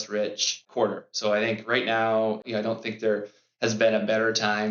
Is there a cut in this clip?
no; 0 cuts

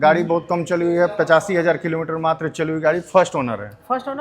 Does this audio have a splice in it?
no; 0 cuts

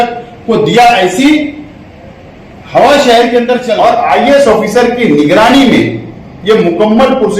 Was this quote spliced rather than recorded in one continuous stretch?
yes; 1 cut; at 3.7 s

